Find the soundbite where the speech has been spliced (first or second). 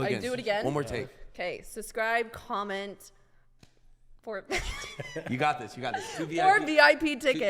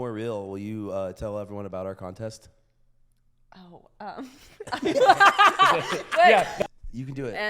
second